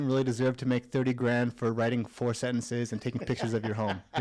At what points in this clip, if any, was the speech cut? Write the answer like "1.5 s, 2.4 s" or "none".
none